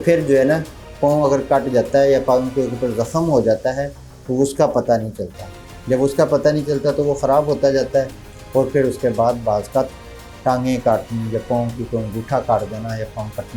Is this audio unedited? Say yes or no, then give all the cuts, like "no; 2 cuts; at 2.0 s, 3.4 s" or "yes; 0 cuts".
yes; 0 cuts